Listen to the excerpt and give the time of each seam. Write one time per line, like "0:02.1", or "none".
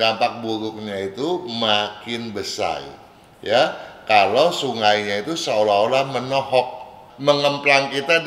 0:07.1